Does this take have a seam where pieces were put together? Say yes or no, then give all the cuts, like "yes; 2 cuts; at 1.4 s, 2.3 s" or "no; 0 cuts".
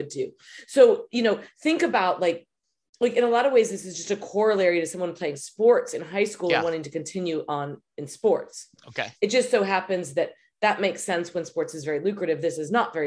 no; 0 cuts